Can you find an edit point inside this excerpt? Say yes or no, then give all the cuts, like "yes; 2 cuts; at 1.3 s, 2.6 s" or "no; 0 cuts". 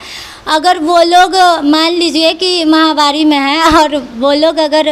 no; 0 cuts